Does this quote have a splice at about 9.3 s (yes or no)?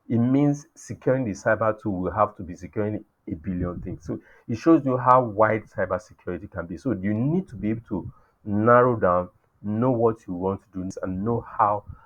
no